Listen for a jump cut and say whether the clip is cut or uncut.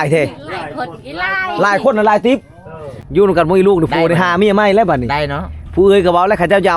cut